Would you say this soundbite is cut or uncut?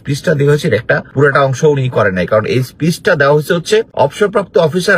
cut